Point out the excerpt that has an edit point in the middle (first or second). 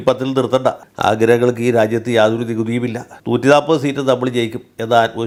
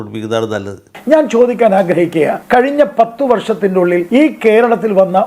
second